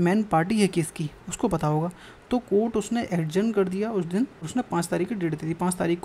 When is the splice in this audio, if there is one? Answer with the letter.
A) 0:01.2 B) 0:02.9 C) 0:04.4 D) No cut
C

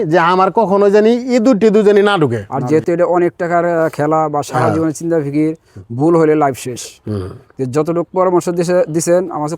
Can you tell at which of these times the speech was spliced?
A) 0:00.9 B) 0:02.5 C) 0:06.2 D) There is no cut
B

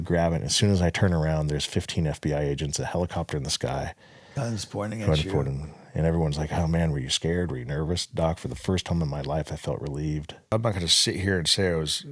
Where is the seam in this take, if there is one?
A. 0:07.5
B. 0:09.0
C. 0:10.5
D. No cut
C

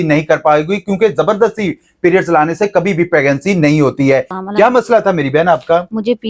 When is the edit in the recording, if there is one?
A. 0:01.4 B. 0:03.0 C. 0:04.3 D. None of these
C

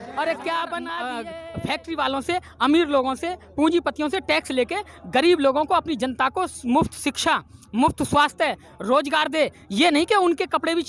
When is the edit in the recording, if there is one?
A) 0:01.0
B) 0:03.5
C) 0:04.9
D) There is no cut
A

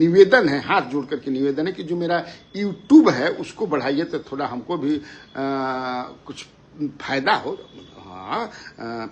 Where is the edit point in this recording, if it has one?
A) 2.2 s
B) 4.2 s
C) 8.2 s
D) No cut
D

